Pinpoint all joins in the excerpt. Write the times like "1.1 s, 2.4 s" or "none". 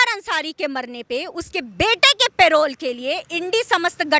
none